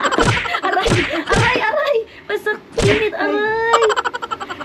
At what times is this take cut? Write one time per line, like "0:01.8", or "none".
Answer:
none